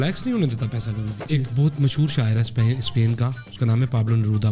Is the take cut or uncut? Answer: cut